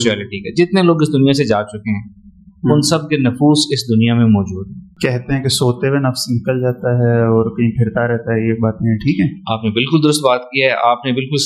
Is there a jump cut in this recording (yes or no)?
yes